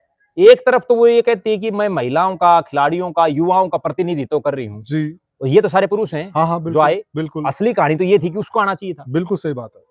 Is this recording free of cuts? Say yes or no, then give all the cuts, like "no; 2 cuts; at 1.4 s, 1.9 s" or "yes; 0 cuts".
yes; 0 cuts